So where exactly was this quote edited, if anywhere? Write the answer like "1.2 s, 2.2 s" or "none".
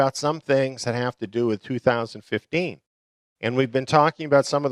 3.1 s